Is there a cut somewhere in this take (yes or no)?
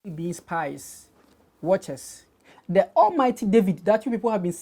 yes